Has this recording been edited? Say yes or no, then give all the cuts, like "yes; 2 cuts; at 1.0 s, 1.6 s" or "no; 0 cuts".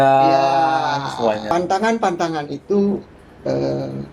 yes; 1 cut; at 1.5 s